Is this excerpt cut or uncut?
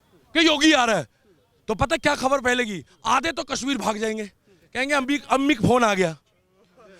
uncut